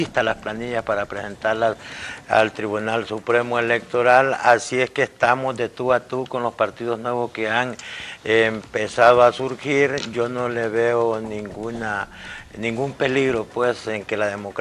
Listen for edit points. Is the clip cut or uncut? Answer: cut